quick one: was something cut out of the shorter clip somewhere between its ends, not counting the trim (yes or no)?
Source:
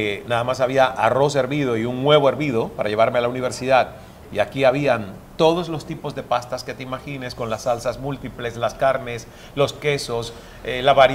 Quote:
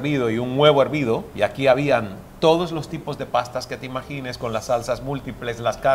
yes